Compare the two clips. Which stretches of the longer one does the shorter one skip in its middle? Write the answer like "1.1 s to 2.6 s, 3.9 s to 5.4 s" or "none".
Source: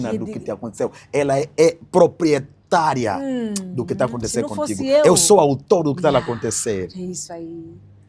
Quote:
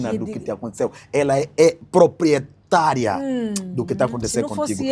none